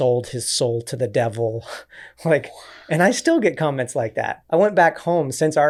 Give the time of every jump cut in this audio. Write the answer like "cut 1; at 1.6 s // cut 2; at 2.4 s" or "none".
none